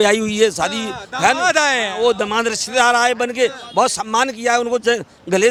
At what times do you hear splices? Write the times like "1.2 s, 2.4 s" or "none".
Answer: none